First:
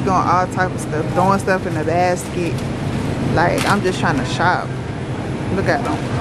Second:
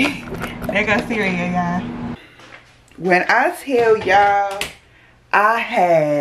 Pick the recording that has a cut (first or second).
second